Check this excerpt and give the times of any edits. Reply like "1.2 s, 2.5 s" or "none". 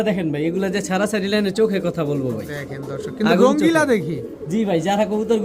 none